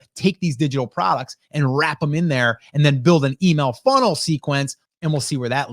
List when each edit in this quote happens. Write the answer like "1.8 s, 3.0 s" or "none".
4.8 s